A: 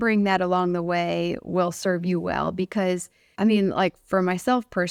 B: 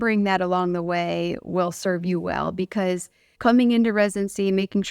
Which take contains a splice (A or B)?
B